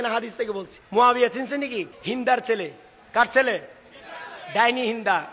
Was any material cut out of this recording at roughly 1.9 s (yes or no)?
yes